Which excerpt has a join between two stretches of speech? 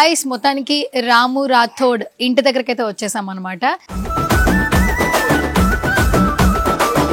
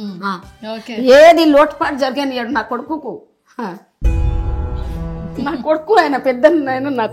first; 1 cut; at 3.9 s

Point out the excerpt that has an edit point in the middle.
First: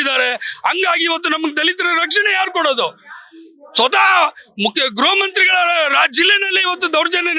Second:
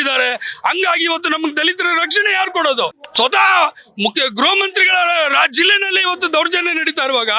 second; 1 cut; at 3.0 s

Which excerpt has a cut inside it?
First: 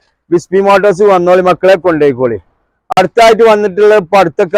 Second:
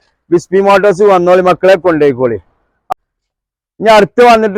second; 1 cut; at 2.8 s

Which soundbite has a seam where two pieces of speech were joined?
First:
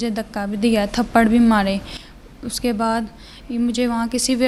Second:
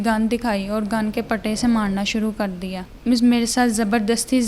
second; 1 cut; at 2.9 s

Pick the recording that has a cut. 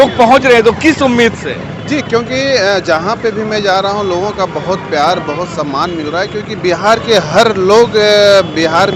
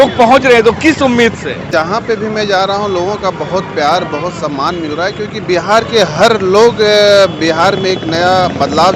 second; 1 cut; at 1.7 s

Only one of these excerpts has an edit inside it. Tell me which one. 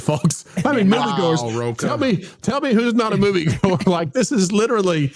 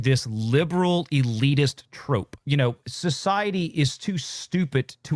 second; 1 cut; at 2.4 s

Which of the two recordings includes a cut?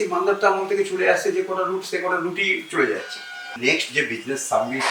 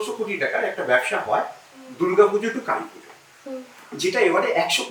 first; 1 cut; at 3.5 s

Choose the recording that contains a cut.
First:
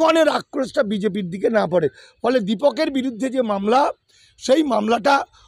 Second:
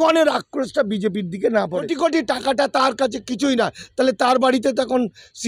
second; 1 cut; at 1.8 s

